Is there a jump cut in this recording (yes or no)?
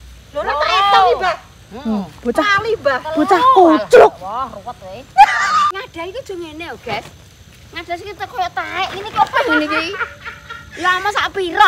yes